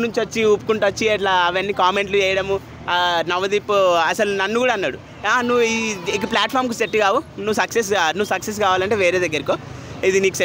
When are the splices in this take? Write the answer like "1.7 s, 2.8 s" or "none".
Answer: none